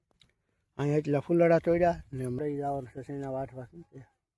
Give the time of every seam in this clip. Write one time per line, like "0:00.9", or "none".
0:02.4